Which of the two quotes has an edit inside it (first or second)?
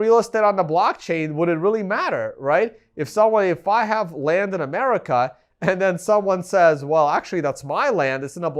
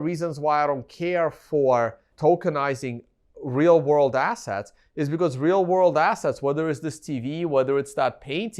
second